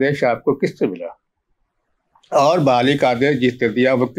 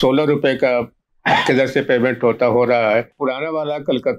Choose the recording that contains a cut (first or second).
second